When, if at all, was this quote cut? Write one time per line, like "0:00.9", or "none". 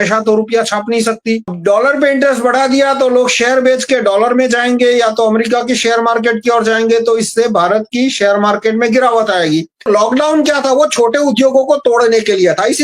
0:01.5
0:09.9